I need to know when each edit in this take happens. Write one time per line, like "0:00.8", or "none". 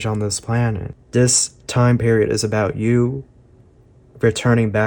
0:00.9